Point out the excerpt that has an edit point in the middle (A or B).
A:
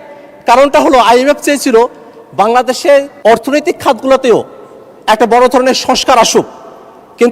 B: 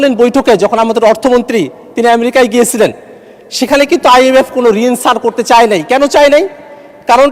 A